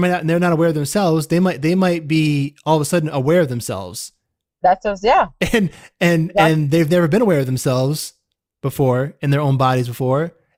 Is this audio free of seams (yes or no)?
yes